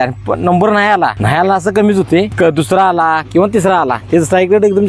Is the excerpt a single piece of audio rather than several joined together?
no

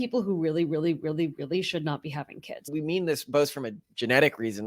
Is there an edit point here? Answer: yes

